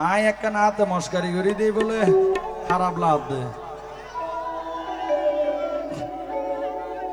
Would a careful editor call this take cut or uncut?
uncut